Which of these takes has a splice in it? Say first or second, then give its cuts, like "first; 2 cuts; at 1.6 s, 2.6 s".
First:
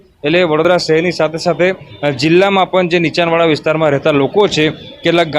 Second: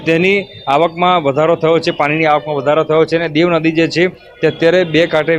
first; 1 cut; at 1.1 s